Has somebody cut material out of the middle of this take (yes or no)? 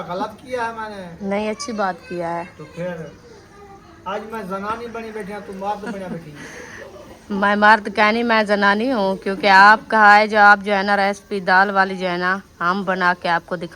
no